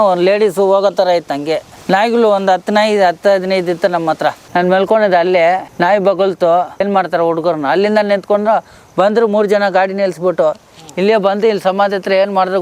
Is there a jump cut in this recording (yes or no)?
yes